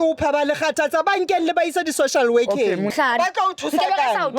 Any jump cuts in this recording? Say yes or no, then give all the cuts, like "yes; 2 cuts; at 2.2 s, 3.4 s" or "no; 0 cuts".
yes; 1 cut; at 2.9 s